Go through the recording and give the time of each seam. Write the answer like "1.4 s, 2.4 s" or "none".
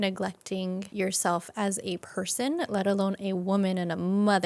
0.9 s, 2.0 s